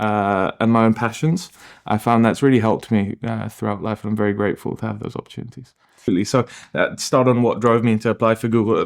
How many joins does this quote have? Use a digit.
1